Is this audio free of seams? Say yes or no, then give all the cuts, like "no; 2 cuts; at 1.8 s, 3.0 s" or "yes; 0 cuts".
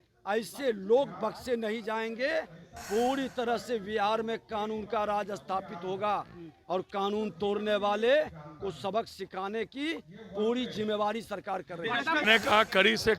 no; 1 cut; at 12.2 s